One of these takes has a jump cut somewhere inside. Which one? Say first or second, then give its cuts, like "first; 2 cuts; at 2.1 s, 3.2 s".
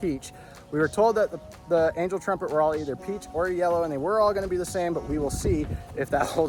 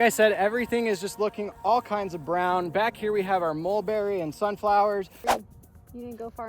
second; 1 cut; at 5.2 s